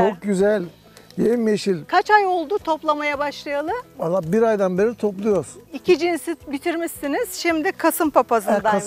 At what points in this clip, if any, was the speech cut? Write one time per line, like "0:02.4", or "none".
0:01.9